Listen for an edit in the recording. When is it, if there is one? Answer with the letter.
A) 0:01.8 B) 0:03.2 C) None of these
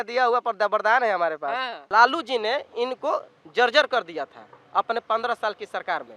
A